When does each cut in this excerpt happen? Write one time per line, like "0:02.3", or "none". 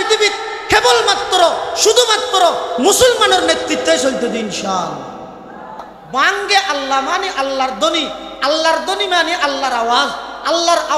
0:06.0

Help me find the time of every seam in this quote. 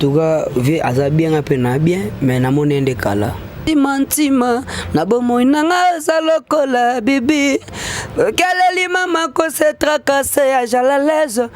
0:03.6

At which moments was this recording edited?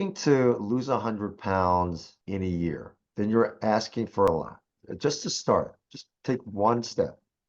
0:02.1
0:03.0
0:04.3

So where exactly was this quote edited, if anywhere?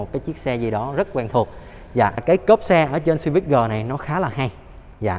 0:02.2

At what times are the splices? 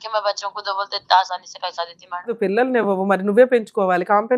0:02.3

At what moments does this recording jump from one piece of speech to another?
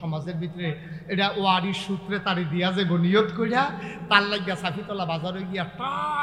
none

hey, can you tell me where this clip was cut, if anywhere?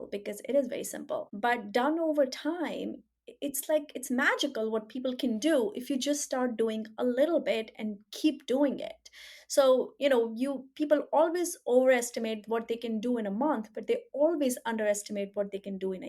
0:01.3

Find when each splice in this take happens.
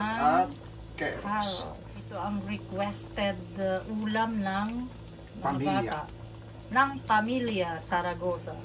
0:01.9

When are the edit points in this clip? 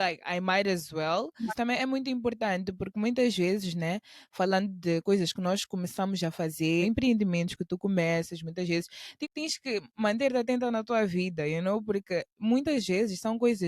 0:01.5
0:06.8
0:09.2

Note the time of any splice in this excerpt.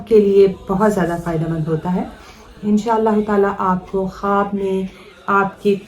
0:02.5

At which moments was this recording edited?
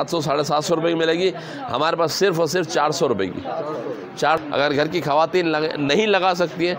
0:04.4

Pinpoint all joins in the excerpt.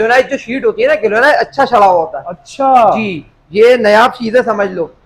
none

